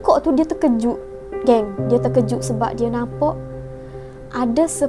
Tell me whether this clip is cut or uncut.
uncut